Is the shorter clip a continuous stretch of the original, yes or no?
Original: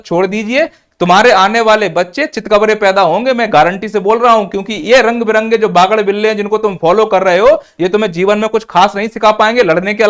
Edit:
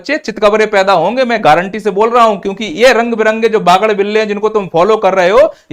yes